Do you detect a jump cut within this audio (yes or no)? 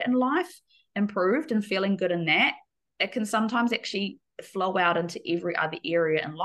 no